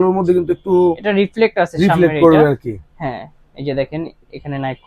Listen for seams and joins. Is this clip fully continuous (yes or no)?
yes